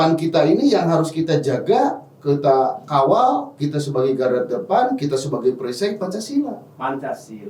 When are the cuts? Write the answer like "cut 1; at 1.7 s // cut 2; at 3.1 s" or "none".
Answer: none